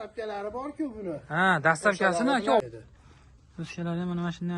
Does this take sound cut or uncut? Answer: cut